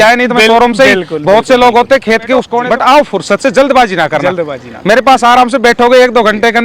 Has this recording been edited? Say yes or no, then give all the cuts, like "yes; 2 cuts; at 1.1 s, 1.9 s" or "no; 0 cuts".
yes; 1 cut; at 2.6 s